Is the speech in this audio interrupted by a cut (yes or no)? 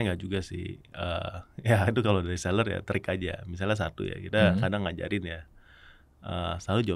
no